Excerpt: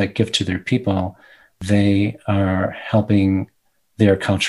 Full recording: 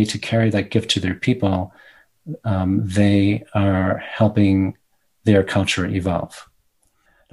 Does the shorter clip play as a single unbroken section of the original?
no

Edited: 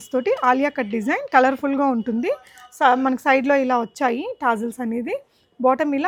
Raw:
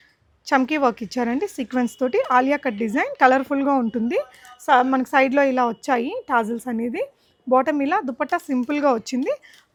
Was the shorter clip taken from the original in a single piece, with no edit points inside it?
yes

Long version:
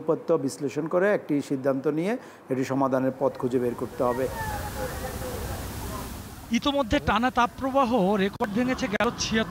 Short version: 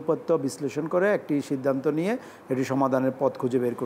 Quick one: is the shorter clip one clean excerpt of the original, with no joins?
yes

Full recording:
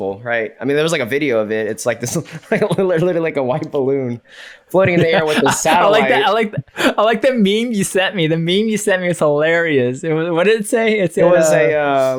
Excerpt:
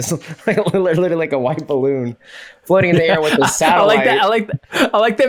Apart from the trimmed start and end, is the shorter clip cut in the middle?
no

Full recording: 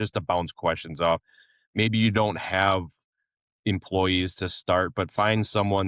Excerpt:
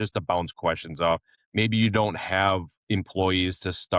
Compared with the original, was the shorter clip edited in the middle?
yes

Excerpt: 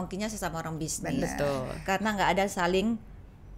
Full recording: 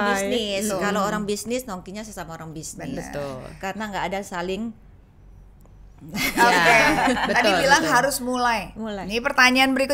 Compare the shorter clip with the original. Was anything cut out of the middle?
no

